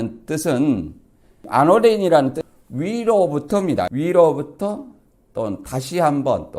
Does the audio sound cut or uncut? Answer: cut